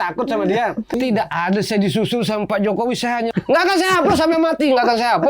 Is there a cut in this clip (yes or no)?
yes